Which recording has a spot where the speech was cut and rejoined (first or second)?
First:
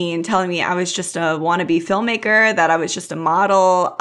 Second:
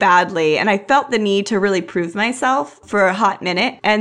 second